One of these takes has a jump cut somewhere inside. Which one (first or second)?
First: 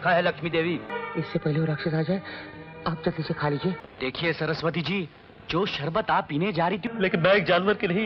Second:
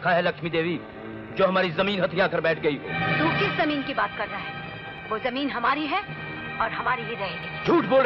first